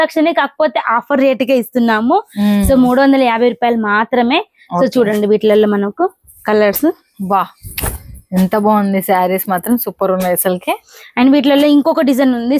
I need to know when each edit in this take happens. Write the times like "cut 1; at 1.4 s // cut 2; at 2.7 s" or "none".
none